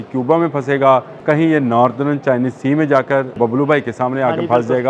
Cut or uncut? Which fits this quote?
cut